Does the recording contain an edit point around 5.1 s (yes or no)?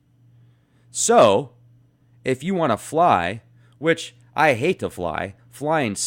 no